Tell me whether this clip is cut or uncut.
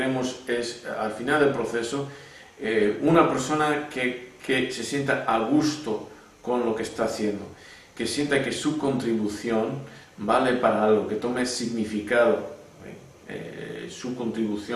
uncut